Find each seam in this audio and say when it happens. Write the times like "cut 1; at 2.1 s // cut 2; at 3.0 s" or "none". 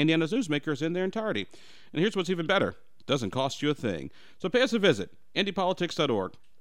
none